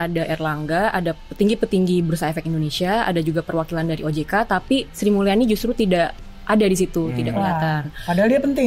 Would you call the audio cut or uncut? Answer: uncut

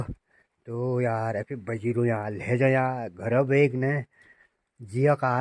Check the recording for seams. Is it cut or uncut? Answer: uncut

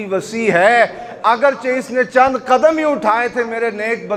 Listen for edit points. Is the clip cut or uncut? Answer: uncut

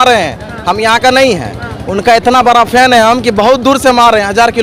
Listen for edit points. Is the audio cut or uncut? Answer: uncut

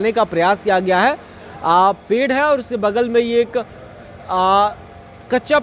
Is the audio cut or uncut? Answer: uncut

